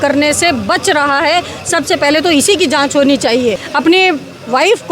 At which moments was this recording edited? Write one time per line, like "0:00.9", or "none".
0:03.7